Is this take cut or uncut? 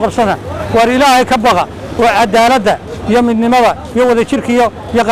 uncut